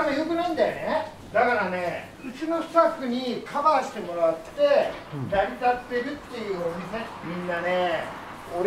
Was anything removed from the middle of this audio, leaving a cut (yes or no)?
no